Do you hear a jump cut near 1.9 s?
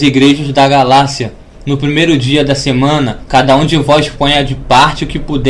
no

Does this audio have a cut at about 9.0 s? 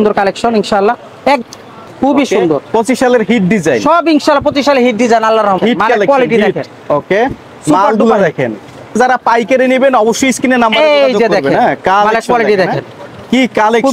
yes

